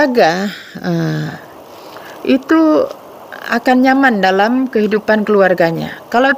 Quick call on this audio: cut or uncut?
uncut